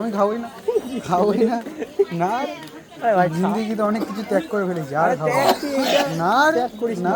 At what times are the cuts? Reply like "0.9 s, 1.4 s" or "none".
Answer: none